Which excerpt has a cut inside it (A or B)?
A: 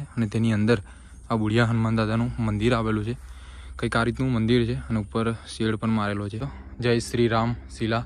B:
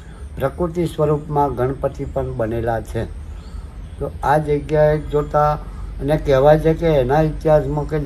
A